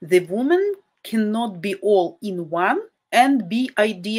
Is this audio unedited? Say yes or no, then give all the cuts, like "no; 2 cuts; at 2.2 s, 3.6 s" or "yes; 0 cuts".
no; 1 cut; at 2.9 s